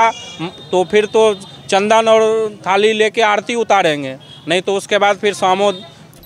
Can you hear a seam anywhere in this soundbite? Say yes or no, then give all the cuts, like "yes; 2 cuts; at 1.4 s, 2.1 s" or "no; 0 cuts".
no; 0 cuts